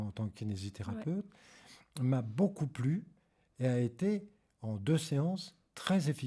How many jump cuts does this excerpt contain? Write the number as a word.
zero